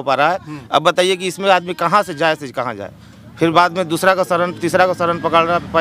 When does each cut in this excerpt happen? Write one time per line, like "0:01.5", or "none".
none